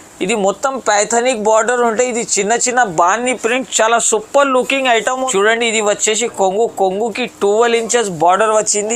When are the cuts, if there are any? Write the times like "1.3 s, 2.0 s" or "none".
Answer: 5.2 s